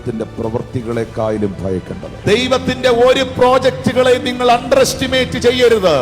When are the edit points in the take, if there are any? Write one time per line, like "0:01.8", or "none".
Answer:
0:02.1

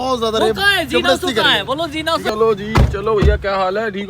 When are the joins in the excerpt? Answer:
0:02.3

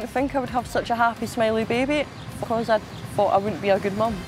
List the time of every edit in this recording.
0:02.2

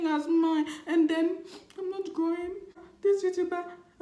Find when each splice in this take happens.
0:02.8

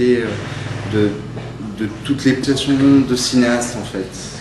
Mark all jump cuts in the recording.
none

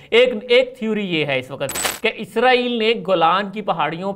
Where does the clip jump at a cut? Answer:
0:01.9

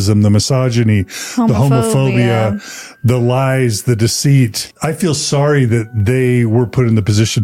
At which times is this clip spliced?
0:04.7

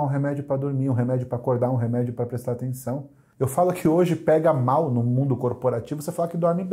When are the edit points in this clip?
0:03.2

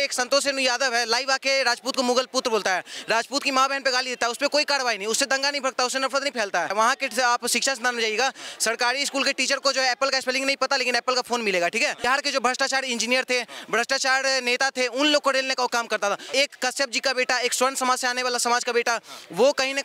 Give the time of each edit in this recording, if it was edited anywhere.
0:06.7
0:12.0
0:16.3

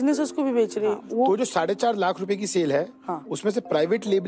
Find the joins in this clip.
0:01.0

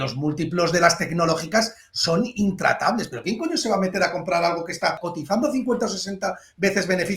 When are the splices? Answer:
0:05.1

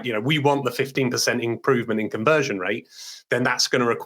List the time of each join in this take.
0:00.9

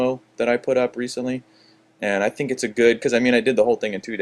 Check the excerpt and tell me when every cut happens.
0:01.9

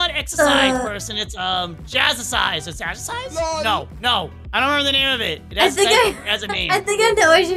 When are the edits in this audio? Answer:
none

